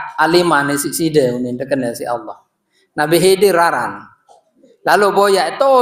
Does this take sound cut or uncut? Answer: uncut